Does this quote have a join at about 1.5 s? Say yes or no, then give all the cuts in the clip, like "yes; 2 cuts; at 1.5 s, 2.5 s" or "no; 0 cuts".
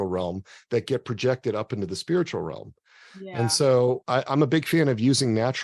no; 1 cut; at 4.0 s